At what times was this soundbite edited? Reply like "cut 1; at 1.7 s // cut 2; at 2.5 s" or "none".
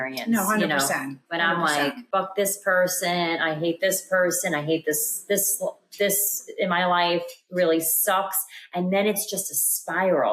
cut 1; at 2.0 s